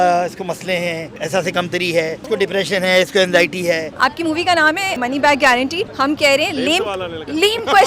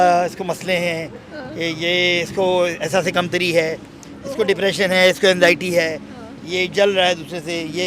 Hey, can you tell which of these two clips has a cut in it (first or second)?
first